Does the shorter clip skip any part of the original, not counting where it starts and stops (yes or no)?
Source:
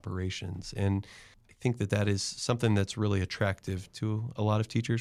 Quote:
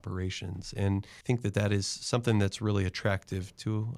yes